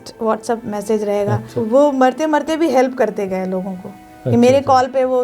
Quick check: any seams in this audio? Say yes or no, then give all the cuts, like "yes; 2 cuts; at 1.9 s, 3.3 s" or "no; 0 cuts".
yes; 1 cut; at 1.5 s